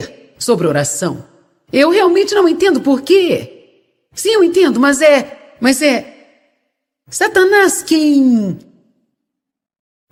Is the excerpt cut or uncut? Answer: uncut